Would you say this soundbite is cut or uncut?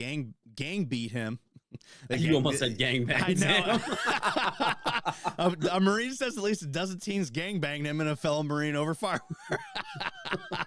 uncut